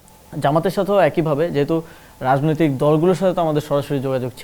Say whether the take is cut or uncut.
uncut